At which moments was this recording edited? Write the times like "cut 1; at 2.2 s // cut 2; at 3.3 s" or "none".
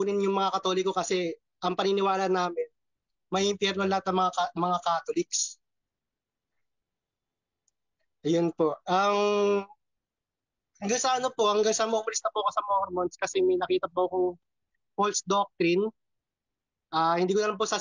none